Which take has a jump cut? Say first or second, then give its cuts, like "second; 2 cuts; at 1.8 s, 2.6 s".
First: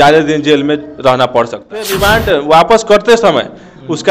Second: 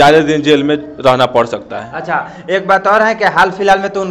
first; 1 cut; at 1.9 s